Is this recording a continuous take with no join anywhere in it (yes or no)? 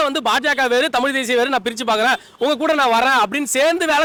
yes